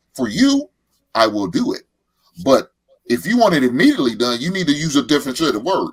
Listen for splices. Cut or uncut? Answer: uncut